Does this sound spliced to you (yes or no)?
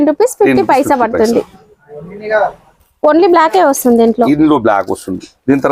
no